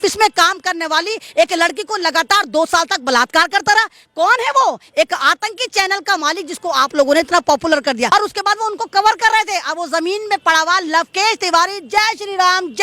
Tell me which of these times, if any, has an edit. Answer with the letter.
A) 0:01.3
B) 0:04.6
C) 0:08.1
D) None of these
C